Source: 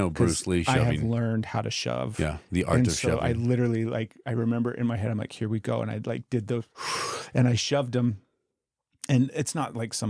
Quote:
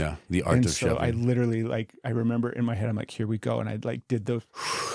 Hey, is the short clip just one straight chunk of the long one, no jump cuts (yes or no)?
yes